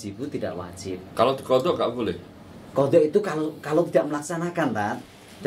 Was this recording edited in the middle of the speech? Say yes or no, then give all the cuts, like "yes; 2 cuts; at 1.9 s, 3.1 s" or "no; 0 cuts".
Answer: yes; 1 cut; at 1.0 s